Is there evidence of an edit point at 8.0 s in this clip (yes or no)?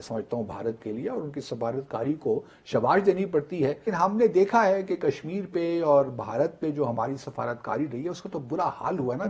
no